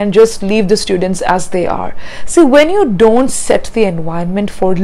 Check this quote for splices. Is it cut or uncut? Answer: uncut